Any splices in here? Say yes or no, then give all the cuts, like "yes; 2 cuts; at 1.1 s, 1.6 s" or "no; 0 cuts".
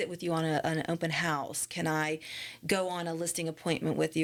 no; 0 cuts